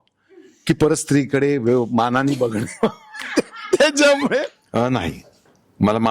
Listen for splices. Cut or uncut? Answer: cut